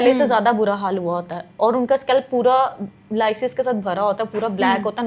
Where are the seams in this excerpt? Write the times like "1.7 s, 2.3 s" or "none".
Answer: none